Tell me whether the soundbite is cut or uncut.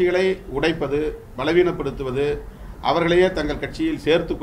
uncut